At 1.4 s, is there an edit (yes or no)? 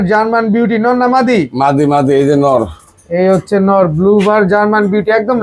no